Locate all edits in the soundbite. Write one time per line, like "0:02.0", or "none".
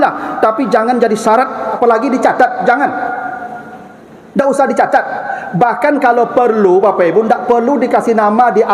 0:01.8